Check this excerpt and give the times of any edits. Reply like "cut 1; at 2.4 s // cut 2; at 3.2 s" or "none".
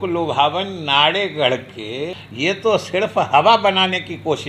cut 1; at 2.2 s